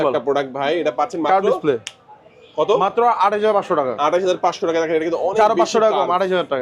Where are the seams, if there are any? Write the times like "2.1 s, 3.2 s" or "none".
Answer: none